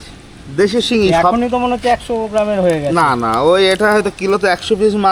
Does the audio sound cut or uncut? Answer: uncut